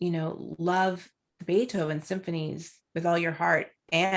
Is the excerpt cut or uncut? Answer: uncut